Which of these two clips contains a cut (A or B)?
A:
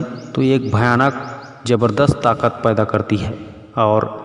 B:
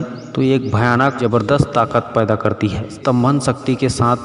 B